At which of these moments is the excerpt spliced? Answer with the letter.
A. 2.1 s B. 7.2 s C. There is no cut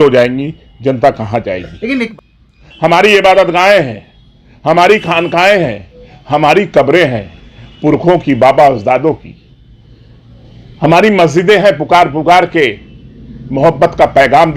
A